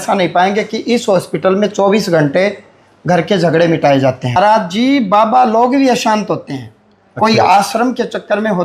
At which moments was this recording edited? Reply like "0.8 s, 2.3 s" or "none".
4.4 s